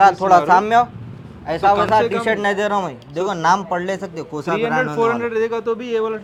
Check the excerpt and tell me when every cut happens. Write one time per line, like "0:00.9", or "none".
none

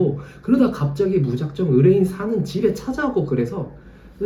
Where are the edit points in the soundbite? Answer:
none

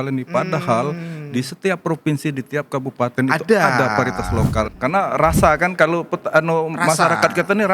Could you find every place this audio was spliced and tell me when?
0:04.7

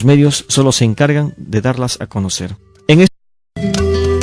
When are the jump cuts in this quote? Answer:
none

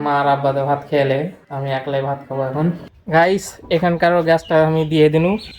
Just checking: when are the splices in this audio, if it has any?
0:02.9

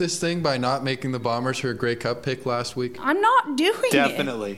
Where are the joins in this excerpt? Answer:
none

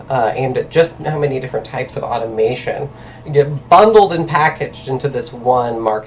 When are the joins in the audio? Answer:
none

